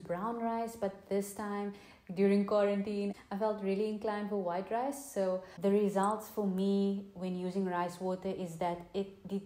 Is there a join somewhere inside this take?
yes; 1 cut; at 5.5 s

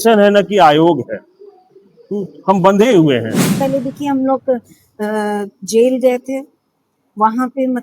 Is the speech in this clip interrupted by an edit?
yes; 1 cut; at 3.6 s

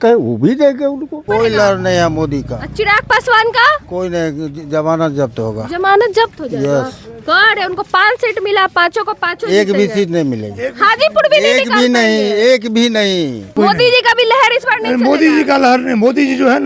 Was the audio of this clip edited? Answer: yes; 2 cuts; at 1.2 s, 13.4 s

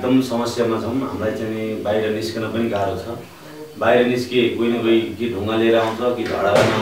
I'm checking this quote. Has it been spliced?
no; 0 cuts

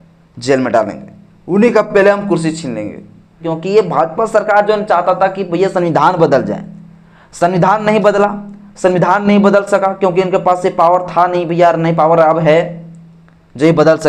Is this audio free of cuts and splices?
no; 1 cut; at 3.5 s

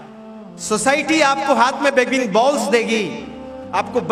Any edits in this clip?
no; 0 cuts

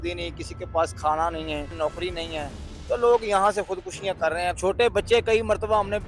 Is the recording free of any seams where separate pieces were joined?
no; 2 cuts; at 1.7 s, 4.6 s

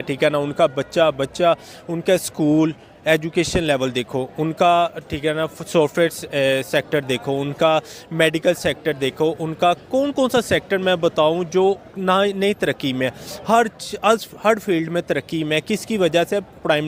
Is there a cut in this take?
no; 0 cuts

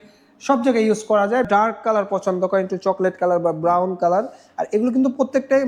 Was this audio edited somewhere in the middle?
yes; 1 cut; at 1.5 s

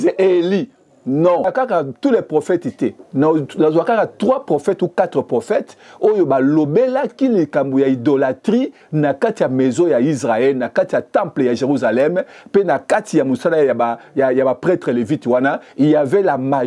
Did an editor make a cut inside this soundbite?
yes; 1 cut; at 1.5 s

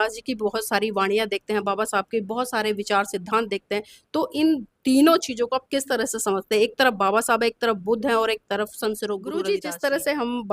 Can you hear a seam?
yes; 1 cut; at 9.4 s

